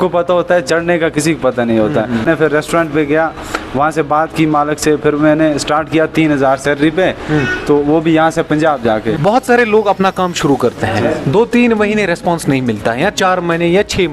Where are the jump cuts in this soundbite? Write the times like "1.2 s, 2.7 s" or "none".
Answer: 2.2 s, 9.2 s